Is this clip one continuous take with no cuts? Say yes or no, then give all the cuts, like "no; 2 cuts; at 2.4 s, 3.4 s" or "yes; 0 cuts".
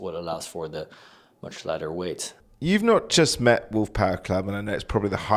yes; 0 cuts